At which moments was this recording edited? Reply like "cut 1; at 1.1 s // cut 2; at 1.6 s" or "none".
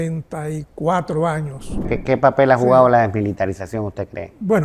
cut 1; at 1.9 s